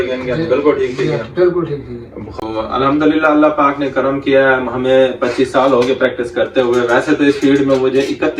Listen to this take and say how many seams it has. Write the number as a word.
one